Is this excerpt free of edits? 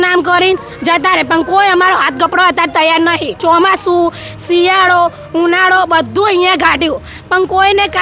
no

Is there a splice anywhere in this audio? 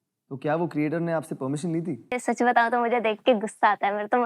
yes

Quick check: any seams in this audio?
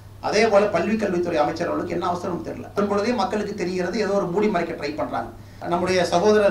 yes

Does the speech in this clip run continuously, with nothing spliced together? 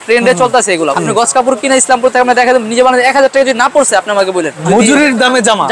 no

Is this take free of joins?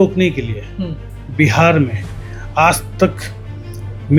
yes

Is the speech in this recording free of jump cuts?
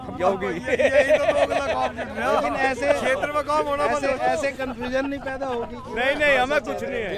yes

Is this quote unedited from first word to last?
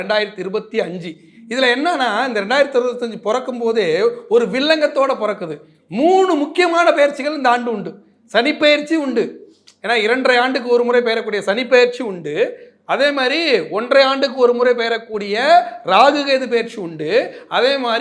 yes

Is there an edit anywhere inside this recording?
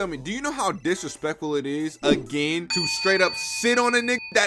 no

